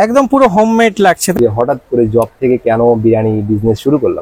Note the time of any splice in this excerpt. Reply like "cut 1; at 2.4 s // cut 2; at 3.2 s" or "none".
cut 1; at 1.3 s